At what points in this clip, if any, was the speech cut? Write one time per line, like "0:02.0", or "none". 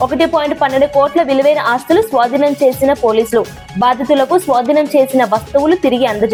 none

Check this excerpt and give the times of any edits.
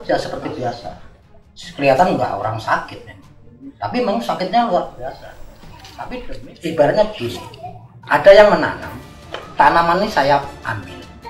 0:06.4

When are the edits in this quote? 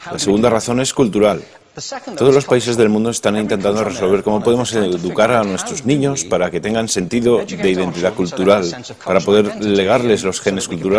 0:04.5

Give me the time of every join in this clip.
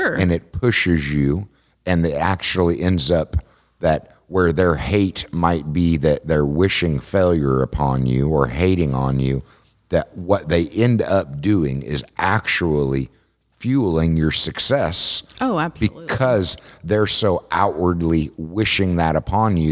none

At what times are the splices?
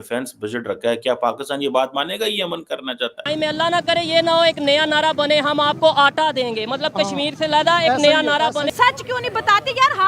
0:03.2
0:08.7

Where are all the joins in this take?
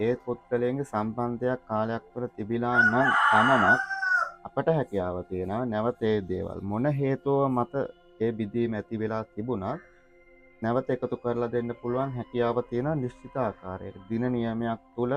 none

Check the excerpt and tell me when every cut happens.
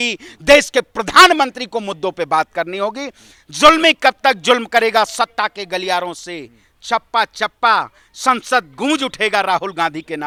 none

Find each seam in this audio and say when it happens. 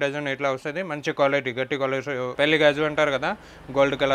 0:02.4

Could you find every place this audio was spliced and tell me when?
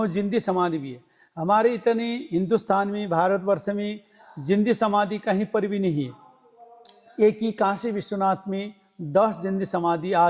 none

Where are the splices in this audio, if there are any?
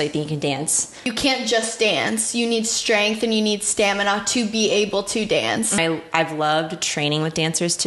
0:01.1
0:05.8

